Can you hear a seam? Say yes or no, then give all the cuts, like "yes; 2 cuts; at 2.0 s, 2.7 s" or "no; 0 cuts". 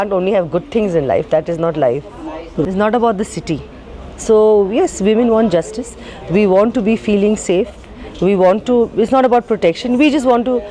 yes; 1 cut; at 2.6 s